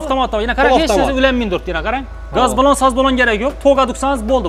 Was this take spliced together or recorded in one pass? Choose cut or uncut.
uncut